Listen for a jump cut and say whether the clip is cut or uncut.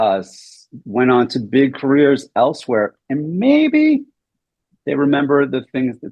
uncut